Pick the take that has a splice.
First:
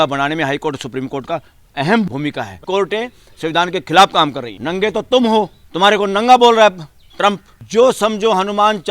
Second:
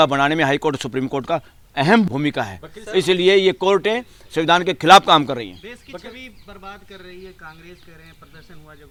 first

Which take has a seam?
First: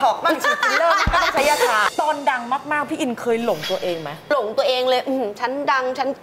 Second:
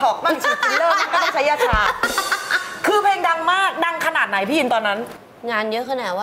first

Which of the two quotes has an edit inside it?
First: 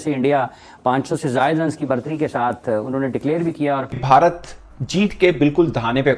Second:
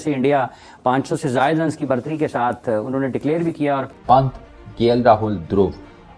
second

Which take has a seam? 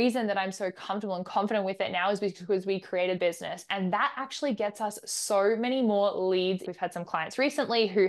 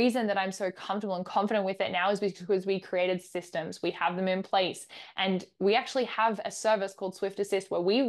first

